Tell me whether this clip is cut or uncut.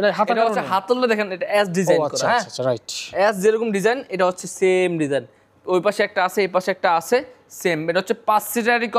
uncut